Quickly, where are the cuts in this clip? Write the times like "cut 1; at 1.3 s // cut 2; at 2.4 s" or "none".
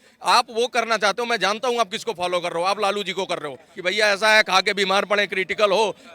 cut 1; at 3.7 s